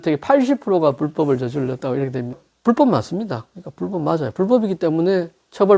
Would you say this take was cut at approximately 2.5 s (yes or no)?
yes